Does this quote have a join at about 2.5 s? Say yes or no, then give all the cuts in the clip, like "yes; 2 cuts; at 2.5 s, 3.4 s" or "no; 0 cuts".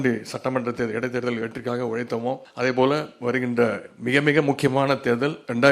yes; 1 cut; at 2.5 s